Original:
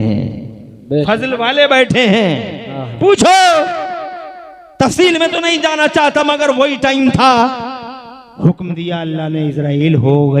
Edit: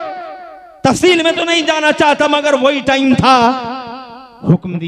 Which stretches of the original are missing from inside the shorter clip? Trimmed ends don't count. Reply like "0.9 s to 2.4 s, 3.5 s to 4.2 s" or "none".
none